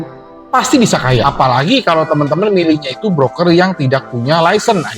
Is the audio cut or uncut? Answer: cut